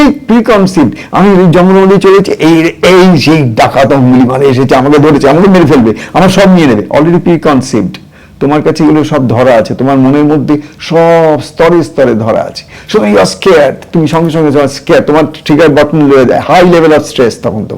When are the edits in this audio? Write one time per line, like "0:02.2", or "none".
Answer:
none